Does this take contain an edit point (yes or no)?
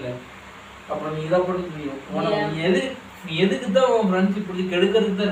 no